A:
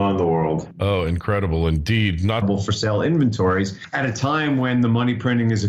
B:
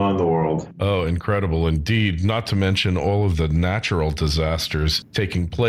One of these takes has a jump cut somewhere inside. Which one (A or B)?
B